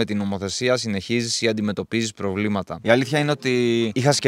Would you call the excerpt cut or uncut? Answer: uncut